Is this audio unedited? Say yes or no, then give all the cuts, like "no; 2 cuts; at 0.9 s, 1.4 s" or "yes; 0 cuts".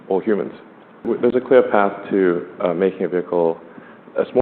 no; 1 cut; at 1.0 s